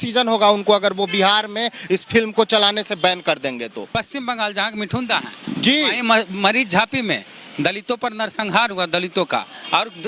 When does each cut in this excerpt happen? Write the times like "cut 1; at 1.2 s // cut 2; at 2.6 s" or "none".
cut 1; at 3.9 s